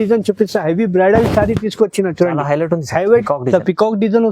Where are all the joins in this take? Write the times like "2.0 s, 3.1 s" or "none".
3.3 s